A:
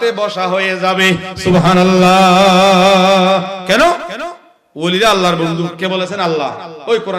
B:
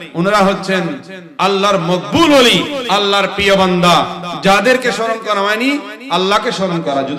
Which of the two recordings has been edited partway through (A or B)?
A